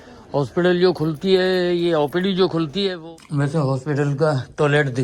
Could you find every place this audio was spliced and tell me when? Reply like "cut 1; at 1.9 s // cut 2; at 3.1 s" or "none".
cut 1; at 3.0 s